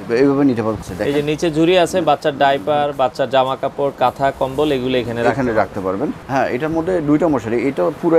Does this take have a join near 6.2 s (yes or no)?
yes